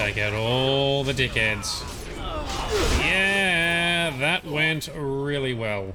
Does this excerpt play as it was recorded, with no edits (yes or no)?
yes